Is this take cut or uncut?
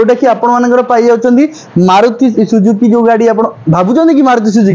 uncut